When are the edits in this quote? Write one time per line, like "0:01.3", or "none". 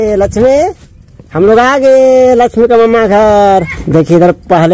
none